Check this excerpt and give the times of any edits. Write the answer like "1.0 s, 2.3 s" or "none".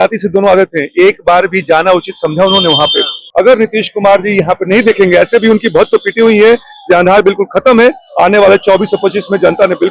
3.2 s

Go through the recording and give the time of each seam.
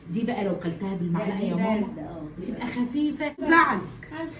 3.4 s

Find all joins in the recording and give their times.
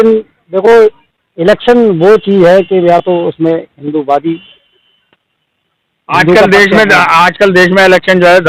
none

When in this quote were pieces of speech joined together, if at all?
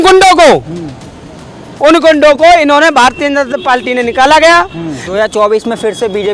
5.0 s

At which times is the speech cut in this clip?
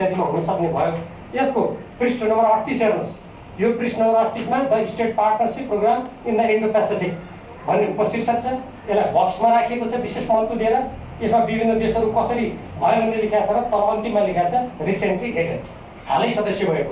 none

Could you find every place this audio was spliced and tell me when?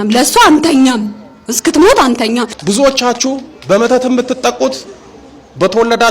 2.5 s

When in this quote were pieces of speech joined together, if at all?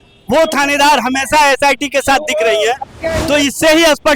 none

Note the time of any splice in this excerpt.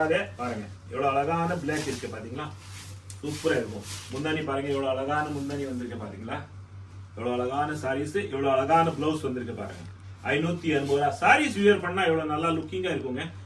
none

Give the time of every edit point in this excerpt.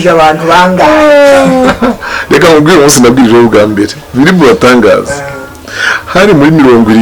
none

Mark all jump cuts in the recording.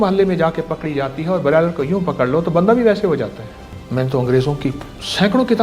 3.8 s

